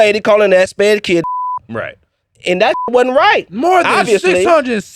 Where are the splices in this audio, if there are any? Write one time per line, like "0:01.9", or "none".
none